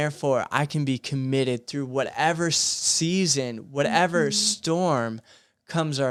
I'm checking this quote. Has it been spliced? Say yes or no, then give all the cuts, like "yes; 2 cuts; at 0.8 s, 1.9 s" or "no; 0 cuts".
no; 0 cuts